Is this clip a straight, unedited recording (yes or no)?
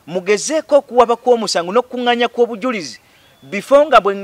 yes